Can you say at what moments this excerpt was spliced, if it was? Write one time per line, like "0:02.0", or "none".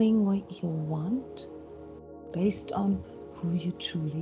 none